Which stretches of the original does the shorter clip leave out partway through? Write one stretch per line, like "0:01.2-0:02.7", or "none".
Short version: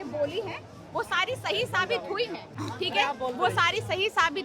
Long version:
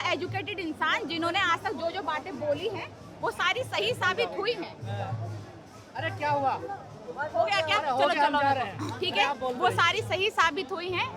0:04.8-0:08.8